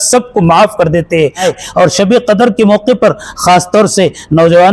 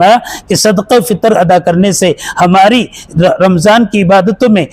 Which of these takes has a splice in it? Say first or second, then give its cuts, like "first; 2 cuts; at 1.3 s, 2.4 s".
first; 1 cut; at 1.5 s